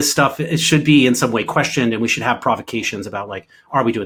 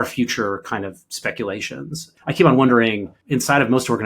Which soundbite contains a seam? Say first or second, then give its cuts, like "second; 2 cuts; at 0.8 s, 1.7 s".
second; 2 cuts; at 2.0 s, 3.2 s